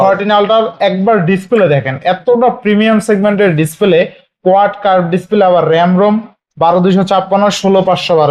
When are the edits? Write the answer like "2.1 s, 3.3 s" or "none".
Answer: none